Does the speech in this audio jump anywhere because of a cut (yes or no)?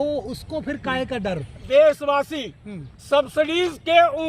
yes